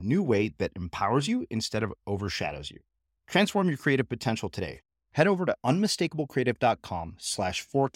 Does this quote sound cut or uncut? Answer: uncut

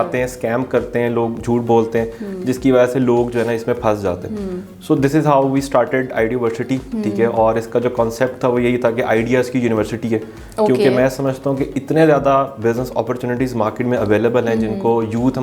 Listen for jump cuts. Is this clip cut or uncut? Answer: uncut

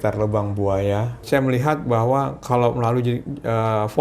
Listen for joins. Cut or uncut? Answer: cut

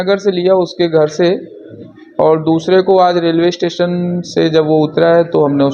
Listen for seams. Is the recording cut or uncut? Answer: uncut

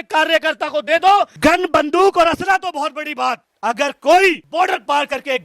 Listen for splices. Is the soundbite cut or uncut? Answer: cut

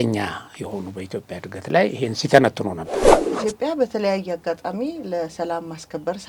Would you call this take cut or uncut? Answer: cut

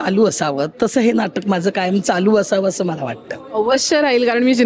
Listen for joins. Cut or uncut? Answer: uncut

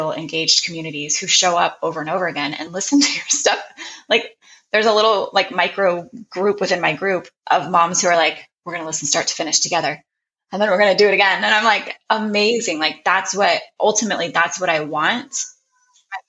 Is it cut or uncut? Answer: uncut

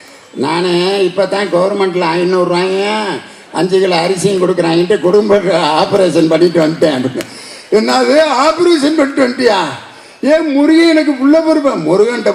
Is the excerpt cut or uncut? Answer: uncut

